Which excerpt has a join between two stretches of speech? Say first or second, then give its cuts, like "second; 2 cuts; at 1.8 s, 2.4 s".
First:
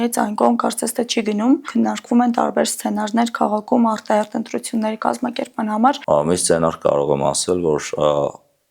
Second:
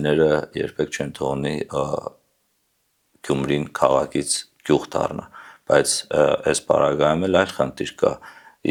first; 2 cuts; at 1.7 s, 6.0 s